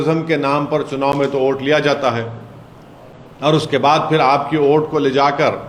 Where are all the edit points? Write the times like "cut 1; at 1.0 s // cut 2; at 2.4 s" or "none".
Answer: none